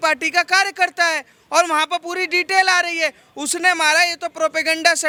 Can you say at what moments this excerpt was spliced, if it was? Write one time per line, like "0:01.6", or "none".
none